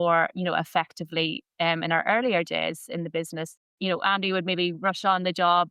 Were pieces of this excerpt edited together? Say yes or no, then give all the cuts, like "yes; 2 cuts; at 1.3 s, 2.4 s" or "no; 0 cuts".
yes; 1 cut; at 3.6 s